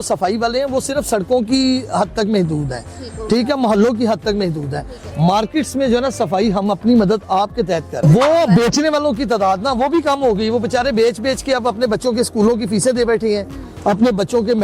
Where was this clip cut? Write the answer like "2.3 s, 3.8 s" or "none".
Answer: 8.0 s